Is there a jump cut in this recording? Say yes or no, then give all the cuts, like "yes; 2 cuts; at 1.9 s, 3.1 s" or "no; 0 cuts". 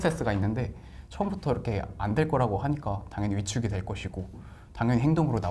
no; 0 cuts